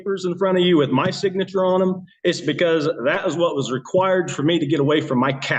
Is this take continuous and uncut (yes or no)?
yes